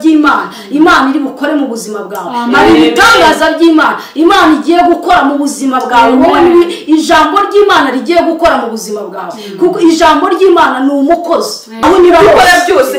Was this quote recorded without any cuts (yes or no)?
no